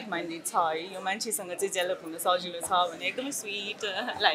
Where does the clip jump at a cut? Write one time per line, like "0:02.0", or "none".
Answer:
none